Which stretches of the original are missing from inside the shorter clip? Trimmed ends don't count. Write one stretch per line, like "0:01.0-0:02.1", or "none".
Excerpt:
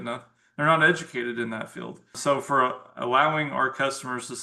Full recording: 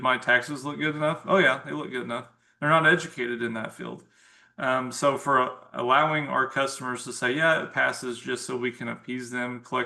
0:04.2-0:04.9